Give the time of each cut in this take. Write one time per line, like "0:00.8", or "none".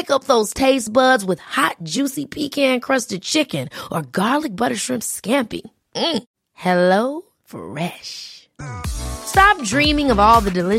none